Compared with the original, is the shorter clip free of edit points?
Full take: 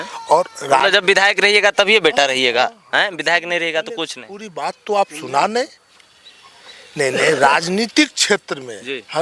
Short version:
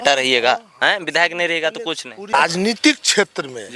no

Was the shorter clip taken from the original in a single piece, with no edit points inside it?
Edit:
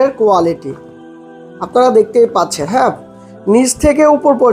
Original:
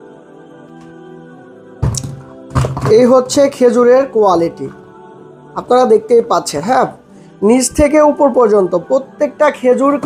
yes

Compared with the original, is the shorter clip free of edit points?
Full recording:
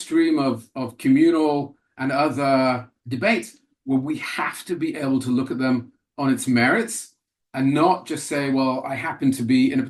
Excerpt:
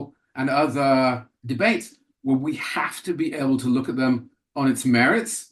yes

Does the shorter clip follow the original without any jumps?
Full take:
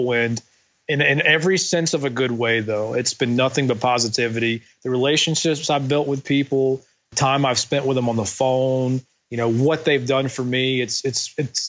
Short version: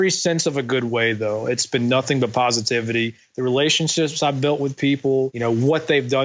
no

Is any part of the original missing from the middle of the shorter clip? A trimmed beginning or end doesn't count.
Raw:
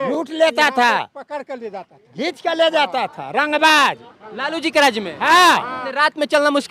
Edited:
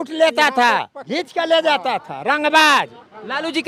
yes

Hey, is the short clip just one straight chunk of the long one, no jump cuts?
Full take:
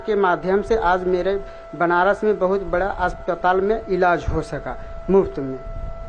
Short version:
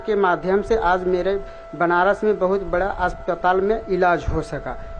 yes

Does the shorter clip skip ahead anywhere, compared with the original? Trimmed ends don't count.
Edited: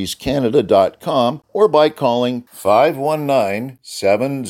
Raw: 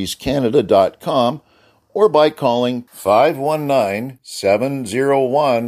yes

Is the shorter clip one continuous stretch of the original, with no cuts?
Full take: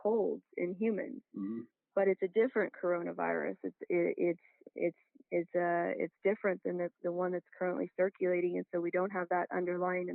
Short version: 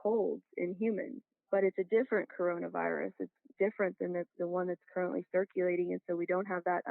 no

